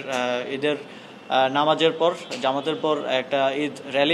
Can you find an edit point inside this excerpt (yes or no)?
no